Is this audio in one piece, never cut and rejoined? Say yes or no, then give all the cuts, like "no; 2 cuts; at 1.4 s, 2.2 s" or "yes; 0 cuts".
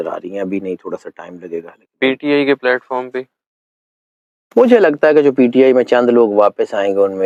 yes; 0 cuts